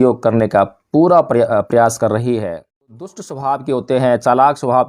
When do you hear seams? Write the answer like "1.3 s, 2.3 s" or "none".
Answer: 3.1 s

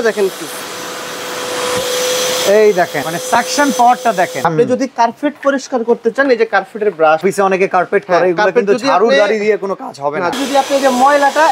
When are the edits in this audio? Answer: 3.1 s, 4.4 s, 7.2 s, 10.3 s

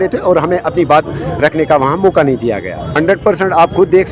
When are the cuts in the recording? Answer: none

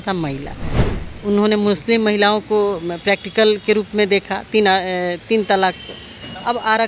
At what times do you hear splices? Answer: none

